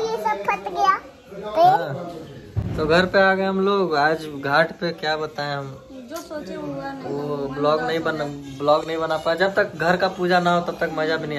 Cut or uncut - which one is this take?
uncut